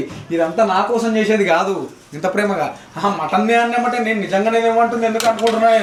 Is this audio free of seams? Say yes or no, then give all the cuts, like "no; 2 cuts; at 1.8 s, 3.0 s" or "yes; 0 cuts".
yes; 0 cuts